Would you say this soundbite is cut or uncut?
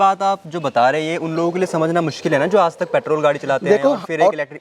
uncut